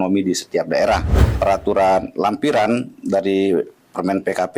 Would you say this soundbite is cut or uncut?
cut